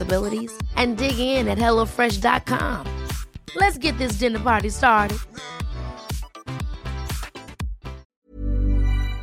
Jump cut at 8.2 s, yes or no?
yes